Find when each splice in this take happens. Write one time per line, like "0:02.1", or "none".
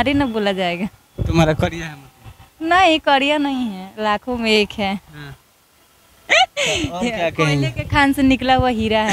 none